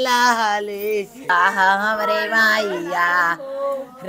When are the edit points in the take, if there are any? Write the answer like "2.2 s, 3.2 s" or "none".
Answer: 1.2 s